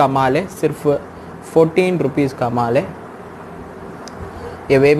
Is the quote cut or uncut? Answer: uncut